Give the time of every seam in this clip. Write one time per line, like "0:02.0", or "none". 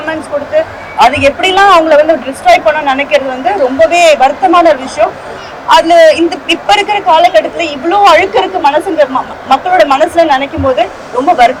none